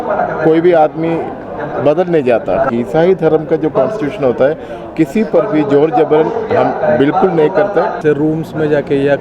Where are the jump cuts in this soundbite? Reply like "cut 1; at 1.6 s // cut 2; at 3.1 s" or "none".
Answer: cut 1; at 2.7 s // cut 2; at 8.0 s